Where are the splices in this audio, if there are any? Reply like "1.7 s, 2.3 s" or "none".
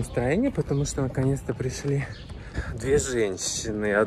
2.7 s